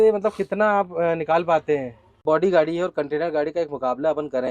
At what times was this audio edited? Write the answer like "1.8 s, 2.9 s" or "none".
2.1 s

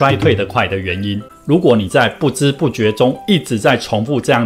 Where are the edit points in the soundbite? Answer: 1.3 s

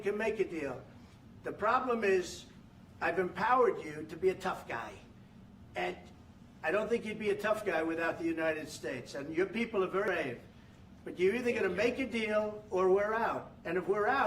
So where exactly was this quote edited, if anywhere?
10.1 s

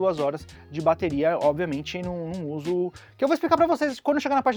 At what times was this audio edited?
none

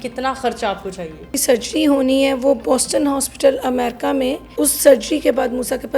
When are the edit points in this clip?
1.4 s, 4.5 s

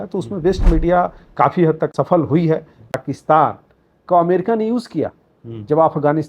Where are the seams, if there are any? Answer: 1.9 s, 3.0 s

